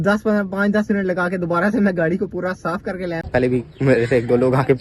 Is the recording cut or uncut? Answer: cut